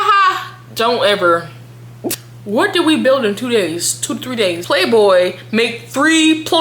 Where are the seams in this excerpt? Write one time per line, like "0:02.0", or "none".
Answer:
0:02.1
0:04.6